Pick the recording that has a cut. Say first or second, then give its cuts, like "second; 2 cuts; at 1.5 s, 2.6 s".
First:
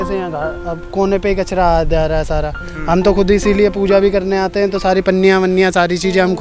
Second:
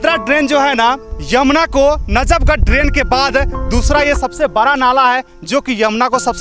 second; 1 cut; at 1.1 s